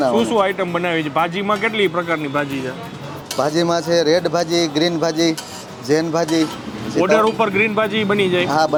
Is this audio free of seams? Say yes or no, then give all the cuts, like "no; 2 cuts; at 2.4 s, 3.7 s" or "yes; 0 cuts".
yes; 0 cuts